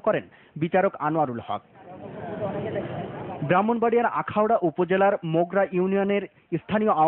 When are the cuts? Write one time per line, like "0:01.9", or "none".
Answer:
none